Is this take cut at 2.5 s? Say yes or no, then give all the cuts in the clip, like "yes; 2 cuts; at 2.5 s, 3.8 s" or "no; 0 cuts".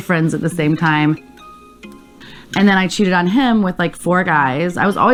no; 0 cuts